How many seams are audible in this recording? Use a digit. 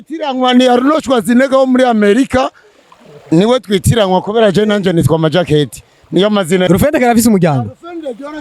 1